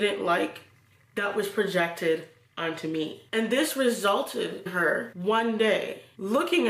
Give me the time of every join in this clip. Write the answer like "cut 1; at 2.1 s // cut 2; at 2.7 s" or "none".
cut 1; at 4.7 s